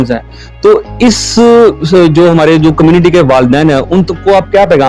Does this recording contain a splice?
no; 0 cuts

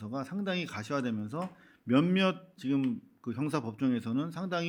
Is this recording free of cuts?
yes; 0 cuts

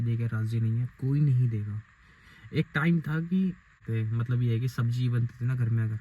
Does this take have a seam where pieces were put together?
yes; 1 cut; at 3.8 s

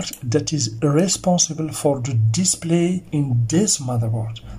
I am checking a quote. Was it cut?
yes; 1 cut; at 3.1 s

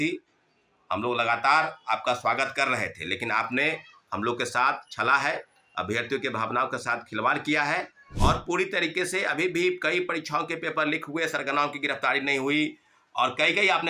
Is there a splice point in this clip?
yes; 1 cut; at 8.0 s

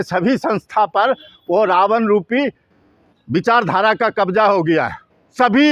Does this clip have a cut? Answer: no; 0 cuts

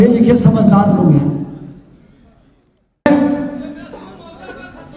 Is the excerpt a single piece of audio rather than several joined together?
no; 1 cut; at 3.1 s

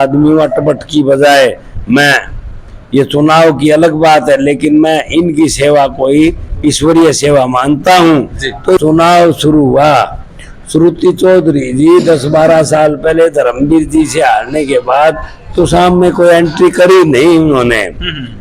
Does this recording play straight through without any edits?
no; 1 cut; at 8.8 s

